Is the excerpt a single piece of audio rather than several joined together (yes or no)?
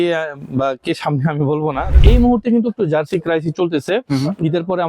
no